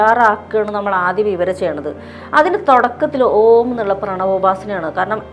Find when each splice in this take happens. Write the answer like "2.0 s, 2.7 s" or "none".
none